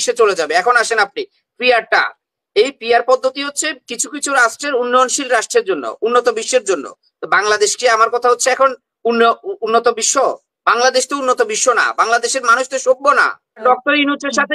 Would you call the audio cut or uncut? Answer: cut